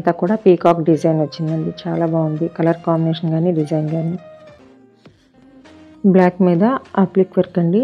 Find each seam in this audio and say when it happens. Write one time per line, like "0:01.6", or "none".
0:04.6